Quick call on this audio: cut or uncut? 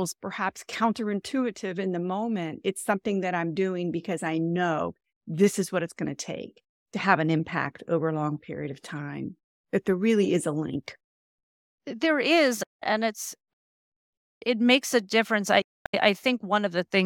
uncut